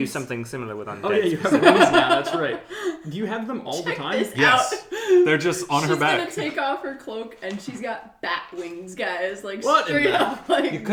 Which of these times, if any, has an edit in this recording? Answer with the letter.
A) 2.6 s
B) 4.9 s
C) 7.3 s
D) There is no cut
D